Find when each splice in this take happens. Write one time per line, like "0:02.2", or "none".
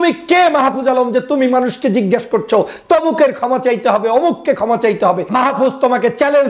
0:05.2